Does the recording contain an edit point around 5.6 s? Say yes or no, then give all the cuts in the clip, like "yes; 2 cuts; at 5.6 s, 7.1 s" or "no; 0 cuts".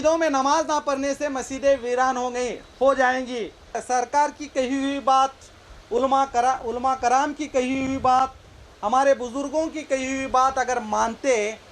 no; 1 cut; at 3.8 s